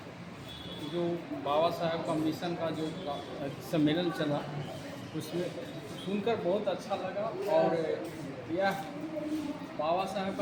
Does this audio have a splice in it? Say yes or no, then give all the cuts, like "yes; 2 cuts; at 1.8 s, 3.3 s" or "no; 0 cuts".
no; 0 cuts